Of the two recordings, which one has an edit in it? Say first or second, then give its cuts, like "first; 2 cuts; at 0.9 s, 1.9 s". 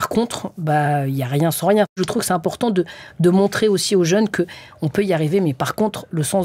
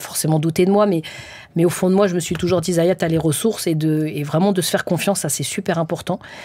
first; 1 cut; at 2.0 s